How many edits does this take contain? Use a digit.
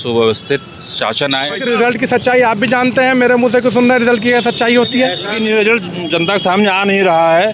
2